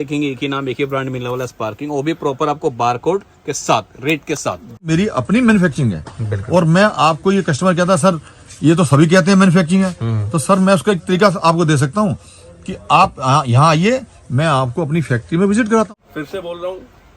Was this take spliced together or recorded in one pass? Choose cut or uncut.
cut